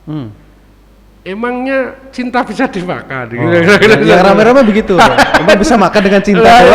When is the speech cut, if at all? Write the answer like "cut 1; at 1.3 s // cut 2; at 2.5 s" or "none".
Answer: none